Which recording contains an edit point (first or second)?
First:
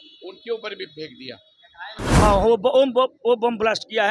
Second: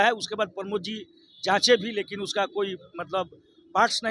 first